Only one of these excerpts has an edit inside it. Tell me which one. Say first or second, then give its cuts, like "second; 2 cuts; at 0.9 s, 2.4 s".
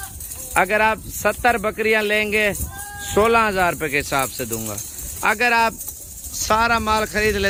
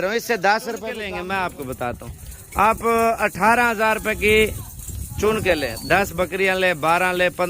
second; 1 cut; at 1.0 s